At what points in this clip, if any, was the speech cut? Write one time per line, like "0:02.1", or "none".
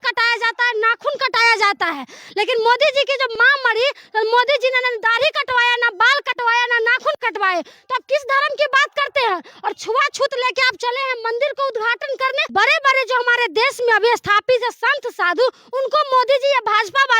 0:03.3
0:12.5